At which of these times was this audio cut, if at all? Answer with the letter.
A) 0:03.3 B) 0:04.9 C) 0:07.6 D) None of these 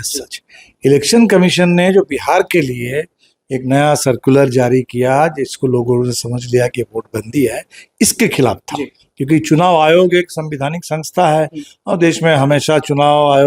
D